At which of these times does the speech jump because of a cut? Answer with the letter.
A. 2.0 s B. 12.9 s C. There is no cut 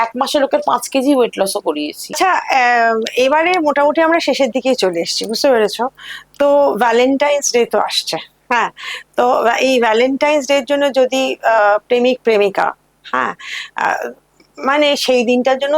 C